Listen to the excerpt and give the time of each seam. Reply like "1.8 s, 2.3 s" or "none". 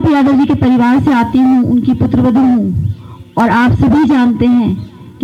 none